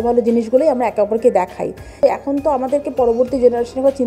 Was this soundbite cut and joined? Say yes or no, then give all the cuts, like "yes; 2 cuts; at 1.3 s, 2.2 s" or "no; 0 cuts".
yes; 1 cut; at 1.9 s